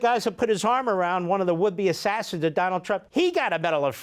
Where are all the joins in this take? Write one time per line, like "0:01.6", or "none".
0:03.1